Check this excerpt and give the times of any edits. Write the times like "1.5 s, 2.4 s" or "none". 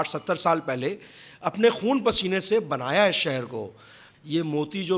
4.1 s